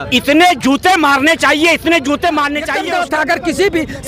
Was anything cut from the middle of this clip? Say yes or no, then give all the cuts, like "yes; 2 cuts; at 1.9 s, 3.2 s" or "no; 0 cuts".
yes; 1 cut; at 2.7 s